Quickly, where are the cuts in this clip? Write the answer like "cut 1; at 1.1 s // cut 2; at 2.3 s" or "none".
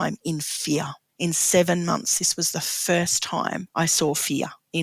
cut 1; at 1.0 s // cut 2; at 3.6 s

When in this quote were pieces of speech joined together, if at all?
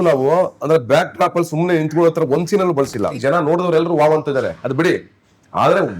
cut 1; at 3.2 s

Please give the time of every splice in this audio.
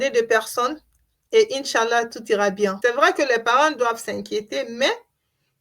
cut 1; at 2.8 s

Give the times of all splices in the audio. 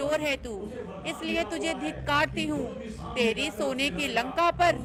none

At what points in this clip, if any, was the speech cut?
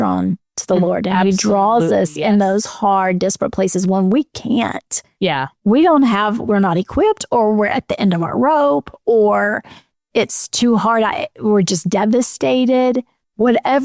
none

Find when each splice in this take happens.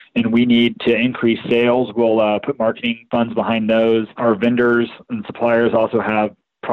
cut 1; at 2.9 s // cut 2; at 4.1 s

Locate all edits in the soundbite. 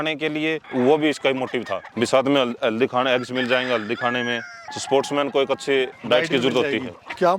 none

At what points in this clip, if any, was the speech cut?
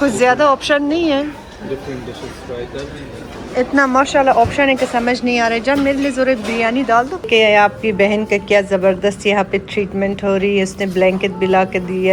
cut 1; at 7.3 s

